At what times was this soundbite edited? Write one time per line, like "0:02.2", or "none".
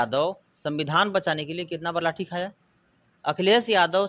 none